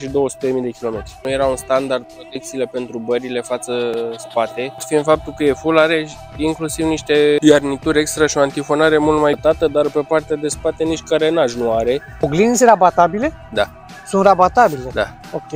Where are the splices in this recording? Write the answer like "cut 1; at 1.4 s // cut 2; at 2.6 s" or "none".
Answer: cut 1; at 1.1 s // cut 2; at 4.8 s // cut 3; at 7.4 s // cut 4; at 9.4 s // cut 5; at 12.2 s